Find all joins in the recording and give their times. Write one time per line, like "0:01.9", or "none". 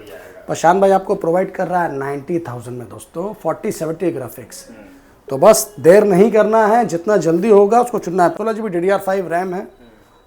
0:08.3

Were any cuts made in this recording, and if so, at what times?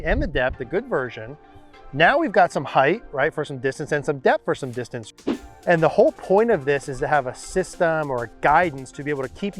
0:05.4

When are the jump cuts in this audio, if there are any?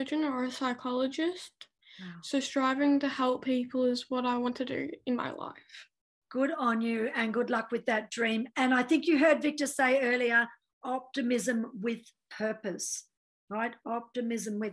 none

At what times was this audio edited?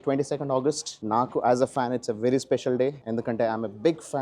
0:00.9
0:03.0

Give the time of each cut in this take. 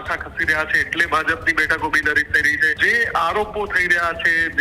0:02.8

